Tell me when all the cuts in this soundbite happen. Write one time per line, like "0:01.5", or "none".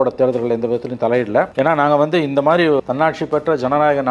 0:01.5
0:02.8